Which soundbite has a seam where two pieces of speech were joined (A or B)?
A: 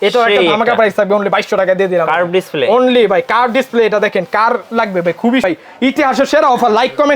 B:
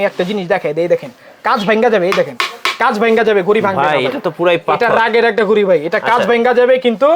A